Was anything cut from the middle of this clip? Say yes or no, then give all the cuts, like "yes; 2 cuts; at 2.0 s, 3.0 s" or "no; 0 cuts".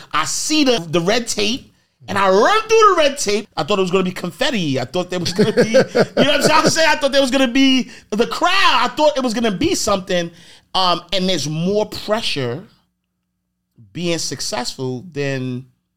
yes; 2 cuts; at 0.8 s, 3.4 s